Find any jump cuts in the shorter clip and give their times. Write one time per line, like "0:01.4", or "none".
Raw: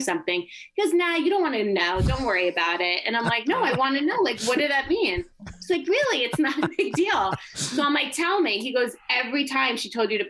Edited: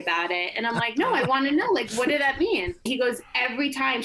0:02.8